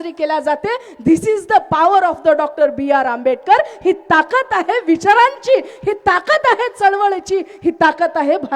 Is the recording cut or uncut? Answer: uncut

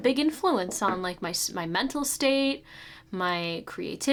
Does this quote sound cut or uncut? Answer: uncut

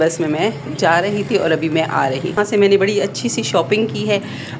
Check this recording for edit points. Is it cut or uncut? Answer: cut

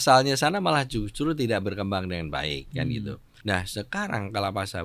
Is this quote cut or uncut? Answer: cut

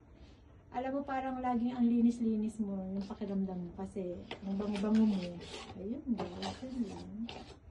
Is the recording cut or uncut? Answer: uncut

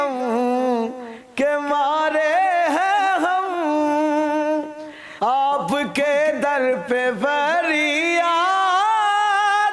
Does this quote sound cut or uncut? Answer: uncut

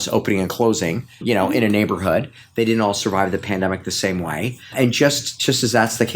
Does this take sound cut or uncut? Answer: cut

